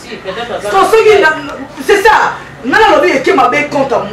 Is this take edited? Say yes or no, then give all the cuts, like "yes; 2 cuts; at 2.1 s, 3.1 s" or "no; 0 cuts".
no; 0 cuts